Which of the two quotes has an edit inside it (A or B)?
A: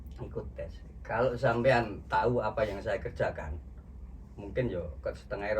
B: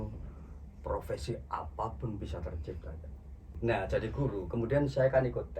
B